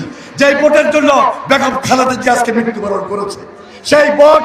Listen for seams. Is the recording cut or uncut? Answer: uncut